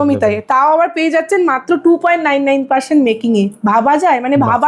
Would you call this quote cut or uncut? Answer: uncut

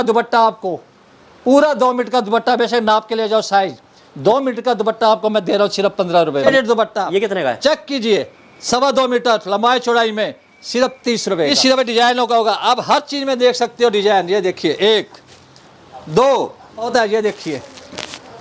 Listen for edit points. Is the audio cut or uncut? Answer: cut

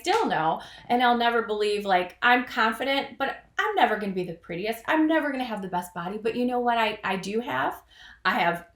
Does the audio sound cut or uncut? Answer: uncut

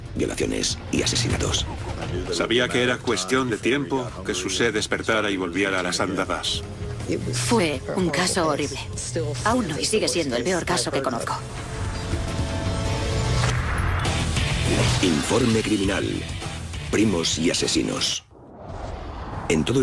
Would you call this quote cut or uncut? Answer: uncut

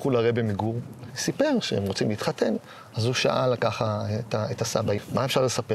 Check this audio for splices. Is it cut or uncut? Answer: cut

